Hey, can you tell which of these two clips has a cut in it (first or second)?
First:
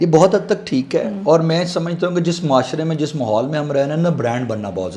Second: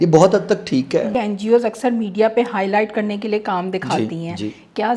second